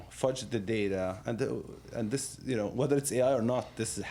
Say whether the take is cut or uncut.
uncut